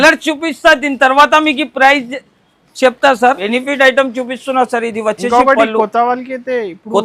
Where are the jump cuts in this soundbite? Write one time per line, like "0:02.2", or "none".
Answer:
0:03.4